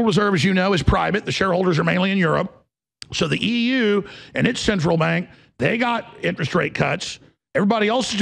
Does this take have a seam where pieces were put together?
no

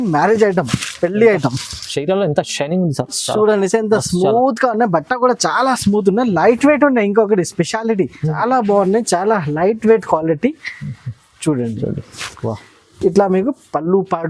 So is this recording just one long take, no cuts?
no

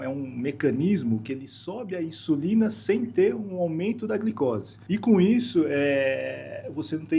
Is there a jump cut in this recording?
yes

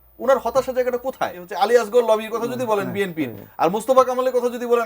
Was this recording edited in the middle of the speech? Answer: yes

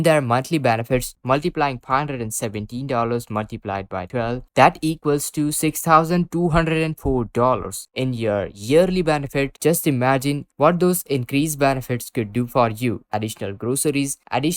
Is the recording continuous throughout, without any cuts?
no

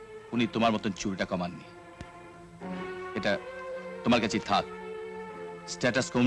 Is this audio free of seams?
yes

